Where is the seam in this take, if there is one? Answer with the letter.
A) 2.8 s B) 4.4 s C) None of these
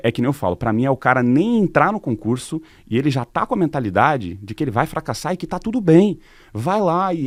C